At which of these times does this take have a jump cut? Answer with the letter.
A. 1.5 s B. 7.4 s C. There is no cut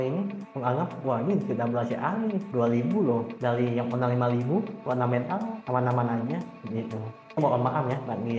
B